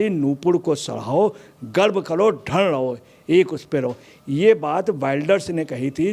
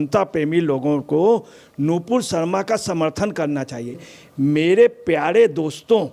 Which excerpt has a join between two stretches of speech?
second; 1 cut; at 4.0 s

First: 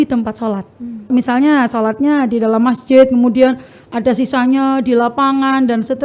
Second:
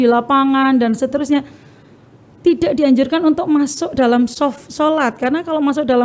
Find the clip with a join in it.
first; 1 cut; at 1.1 s

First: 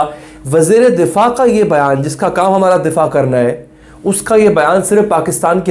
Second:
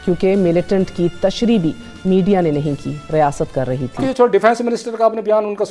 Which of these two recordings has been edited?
second; 1 cut; at 4.3 s

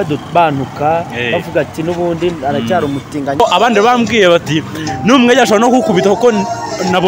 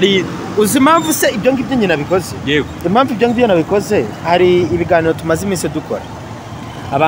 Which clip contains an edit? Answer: first; 1 cut; at 3.4 s

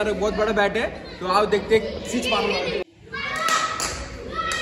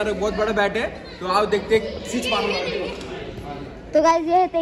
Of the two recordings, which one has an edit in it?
first; 1 cut; at 2.8 s

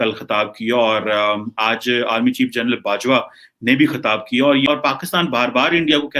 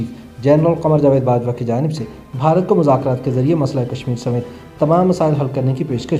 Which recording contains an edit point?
first; 1 cut; at 4.7 s

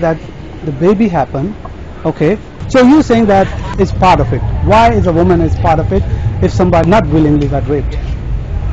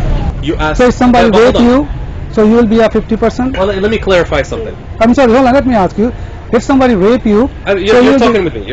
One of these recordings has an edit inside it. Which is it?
first; 3 cuts; at 2.6 s, 3.7 s, 6.8 s

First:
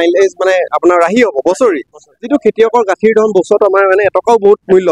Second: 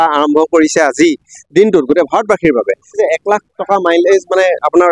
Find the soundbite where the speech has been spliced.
second; 1 cut; at 3.0 s

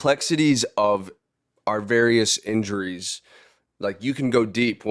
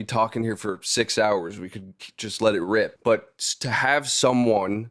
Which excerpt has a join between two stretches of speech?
second; 1 cut; at 2.9 s

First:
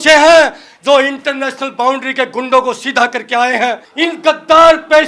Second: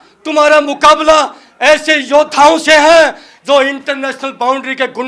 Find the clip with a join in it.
first; 1 cut; at 3.9 s

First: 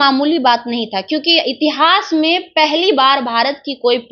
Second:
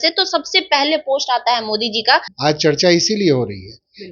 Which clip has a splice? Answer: second; 1 cut; at 2.3 s

